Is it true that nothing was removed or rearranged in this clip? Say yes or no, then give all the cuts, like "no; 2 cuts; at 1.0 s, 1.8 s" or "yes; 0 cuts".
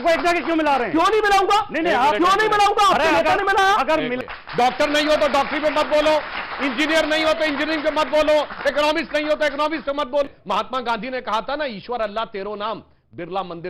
no; 2 cuts; at 4.2 s, 10.2 s